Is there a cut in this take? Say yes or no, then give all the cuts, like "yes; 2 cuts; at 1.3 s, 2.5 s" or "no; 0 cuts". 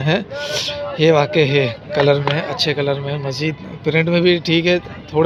no; 0 cuts